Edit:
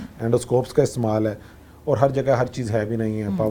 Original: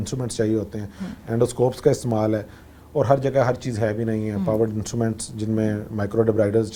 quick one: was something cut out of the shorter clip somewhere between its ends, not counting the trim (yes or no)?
no